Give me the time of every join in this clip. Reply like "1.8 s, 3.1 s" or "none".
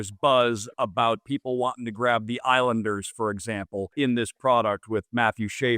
1.2 s, 3.9 s